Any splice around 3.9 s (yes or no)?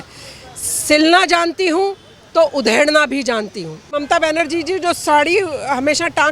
yes